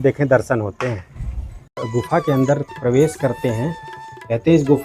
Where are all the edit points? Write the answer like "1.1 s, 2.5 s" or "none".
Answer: 1.8 s